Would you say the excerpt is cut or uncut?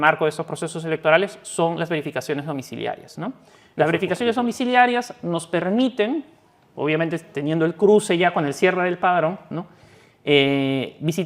uncut